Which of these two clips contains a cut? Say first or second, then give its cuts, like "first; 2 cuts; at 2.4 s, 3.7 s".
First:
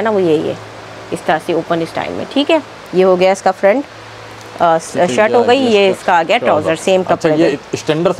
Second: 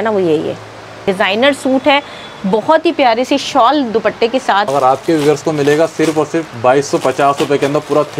second; 2 cuts; at 1.0 s, 4.7 s